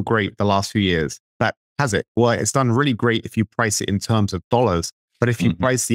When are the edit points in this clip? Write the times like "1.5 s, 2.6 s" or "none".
1.4 s